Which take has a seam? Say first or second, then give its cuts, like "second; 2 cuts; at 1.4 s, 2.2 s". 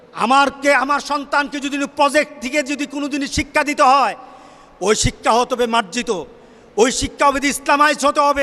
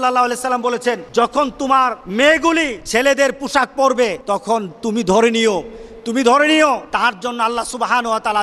second; 5 cuts; at 1.0 s, 2.0 s, 2.8 s, 4.2 s, 6.8 s